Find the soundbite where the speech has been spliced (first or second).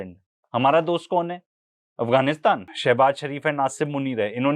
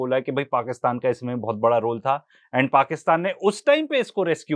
first